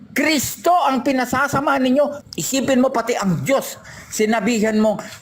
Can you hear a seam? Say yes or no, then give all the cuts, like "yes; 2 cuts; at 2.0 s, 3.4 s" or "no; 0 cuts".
yes; 1 cut; at 2.2 s